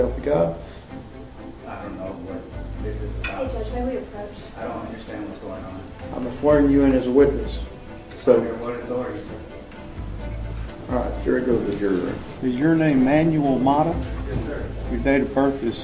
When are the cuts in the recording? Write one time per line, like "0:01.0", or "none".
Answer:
0:12.3